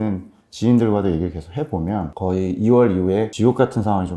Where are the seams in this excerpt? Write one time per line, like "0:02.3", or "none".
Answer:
0:02.1
0:03.3